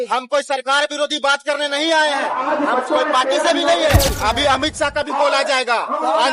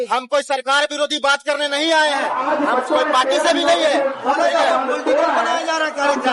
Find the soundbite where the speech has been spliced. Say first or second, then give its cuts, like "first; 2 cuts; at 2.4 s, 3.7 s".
first; 1 cut; at 4.2 s